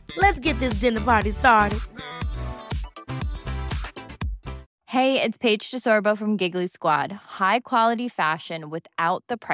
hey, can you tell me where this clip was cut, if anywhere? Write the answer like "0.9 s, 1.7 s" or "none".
4.7 s